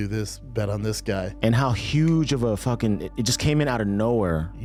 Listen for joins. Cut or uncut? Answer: uncut